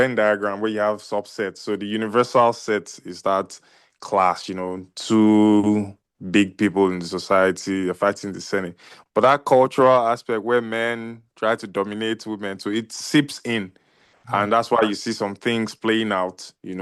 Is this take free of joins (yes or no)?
yes